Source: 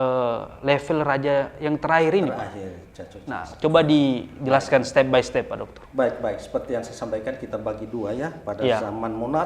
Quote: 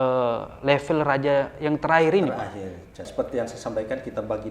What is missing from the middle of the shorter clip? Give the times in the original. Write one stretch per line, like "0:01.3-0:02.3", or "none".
0:03.1-0:06.4